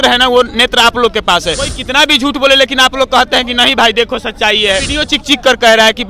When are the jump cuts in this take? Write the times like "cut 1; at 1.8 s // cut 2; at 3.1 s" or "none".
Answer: cut 1; at 1.7 s // cut 2; at 4.9 s